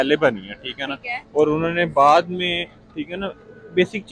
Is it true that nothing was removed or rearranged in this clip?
yes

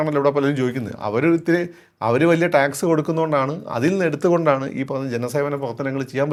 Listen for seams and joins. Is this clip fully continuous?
yes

